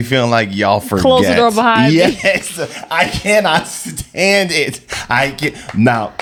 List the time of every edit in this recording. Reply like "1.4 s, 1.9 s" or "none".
none